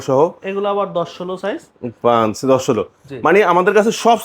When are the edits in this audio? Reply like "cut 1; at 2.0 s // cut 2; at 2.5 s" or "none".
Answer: none